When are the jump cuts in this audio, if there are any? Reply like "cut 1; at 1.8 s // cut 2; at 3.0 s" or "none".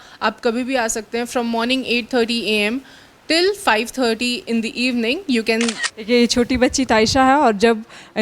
cut 1; at 5.9 s